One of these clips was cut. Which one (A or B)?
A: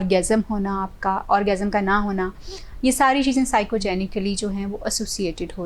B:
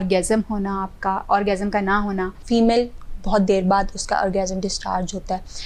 B